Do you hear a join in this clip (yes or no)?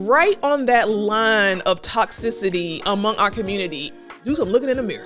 yes